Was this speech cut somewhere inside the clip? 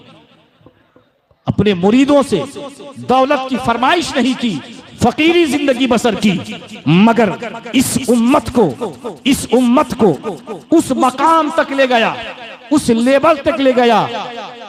no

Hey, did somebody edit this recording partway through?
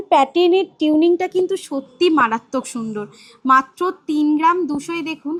no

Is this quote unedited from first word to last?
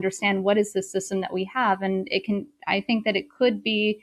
yes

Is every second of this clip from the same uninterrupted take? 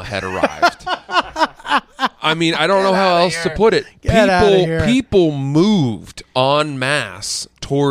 yes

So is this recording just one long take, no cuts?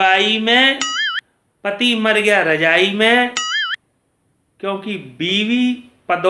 yes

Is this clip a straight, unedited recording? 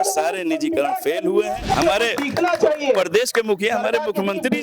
no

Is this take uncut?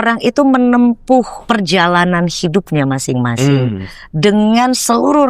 no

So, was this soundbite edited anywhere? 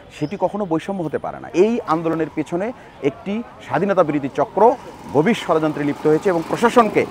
yes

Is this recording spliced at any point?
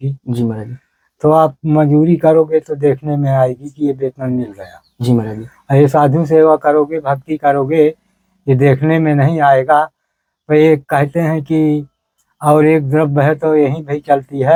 no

